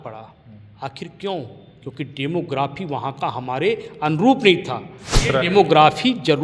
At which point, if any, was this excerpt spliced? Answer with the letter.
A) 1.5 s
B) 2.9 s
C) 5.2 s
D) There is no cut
C